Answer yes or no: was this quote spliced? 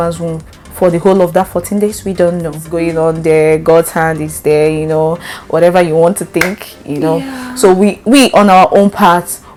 no